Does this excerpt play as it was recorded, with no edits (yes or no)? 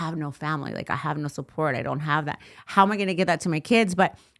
yes